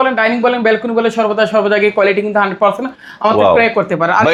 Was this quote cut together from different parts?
no; 0 cuts

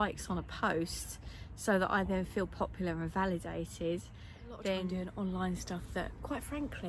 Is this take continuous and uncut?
no; 1 cut; at 5.0 s

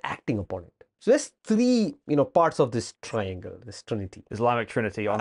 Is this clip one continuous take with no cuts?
no; 2 cuts; at 0.9 s, 4.3 s

